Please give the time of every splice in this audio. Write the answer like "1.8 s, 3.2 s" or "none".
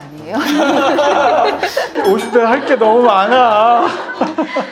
none